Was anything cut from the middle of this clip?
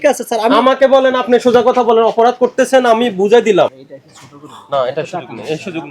yes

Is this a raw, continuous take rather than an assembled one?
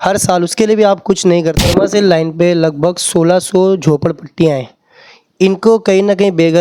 no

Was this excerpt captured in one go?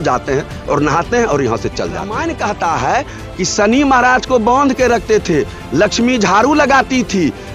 no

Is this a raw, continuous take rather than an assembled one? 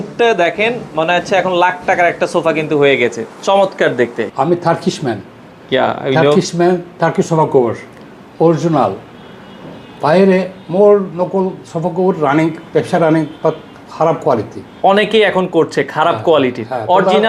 yes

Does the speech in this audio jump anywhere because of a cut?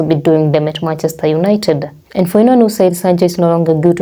no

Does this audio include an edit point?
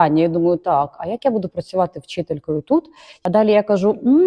yes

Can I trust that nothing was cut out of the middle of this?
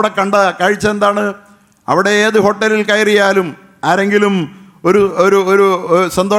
yes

